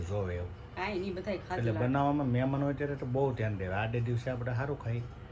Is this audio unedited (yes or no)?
yes